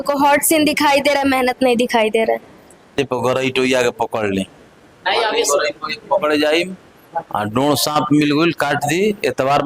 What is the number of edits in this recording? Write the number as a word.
one